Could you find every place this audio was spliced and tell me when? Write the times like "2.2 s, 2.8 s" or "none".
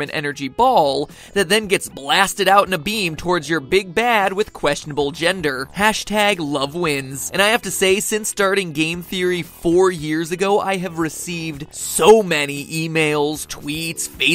5.1 s